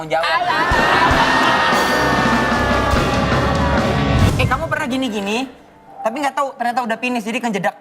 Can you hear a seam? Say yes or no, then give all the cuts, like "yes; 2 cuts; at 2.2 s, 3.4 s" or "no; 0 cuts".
yes; 1 cut; at 4.3 s